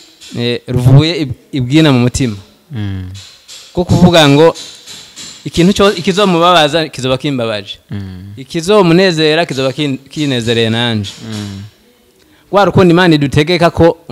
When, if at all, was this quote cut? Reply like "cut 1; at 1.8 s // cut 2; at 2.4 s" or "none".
none